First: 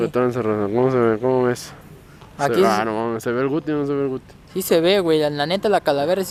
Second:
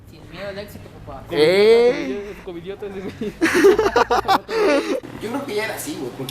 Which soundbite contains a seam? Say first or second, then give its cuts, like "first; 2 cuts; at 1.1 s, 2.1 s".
second; 1 cut; at 5.1 s